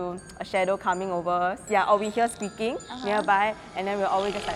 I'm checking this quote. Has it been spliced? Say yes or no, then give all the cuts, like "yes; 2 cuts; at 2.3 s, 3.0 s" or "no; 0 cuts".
no; 0 cuts